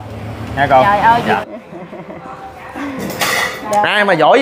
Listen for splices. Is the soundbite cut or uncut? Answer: cut